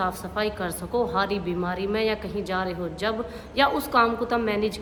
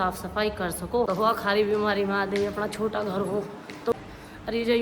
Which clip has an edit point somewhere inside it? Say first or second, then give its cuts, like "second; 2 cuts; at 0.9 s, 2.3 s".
second; 2 cuts; at 1.1 s, 3.9 s